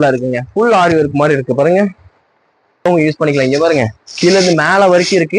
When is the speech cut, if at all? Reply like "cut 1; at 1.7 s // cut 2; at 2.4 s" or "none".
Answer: cut 1; at 2.8 s